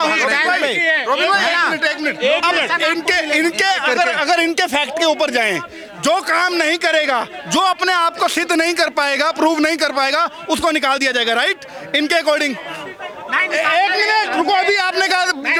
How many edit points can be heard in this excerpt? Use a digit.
0